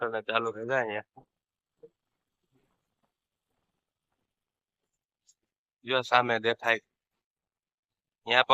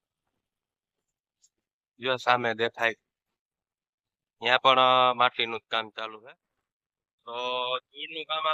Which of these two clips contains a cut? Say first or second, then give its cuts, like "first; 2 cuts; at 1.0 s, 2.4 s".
second; 1 cut; at 6.2 s